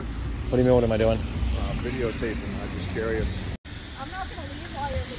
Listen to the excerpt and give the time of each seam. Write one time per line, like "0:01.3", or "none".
0:03.5